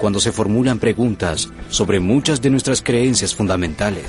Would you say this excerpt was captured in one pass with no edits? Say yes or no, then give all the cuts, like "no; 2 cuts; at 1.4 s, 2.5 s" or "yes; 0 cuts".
yes; 0 cuts